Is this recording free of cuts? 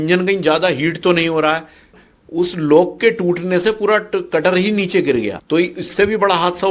no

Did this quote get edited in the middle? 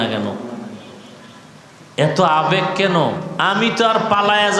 yes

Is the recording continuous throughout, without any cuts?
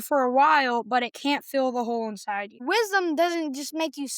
no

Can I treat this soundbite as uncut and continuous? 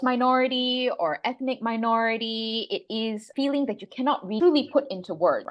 yes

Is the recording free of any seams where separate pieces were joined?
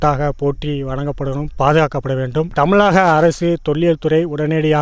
yes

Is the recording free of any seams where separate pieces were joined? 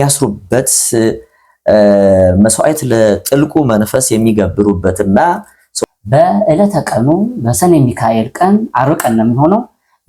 no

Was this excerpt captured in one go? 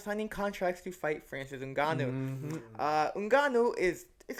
yes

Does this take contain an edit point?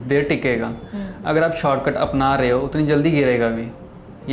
no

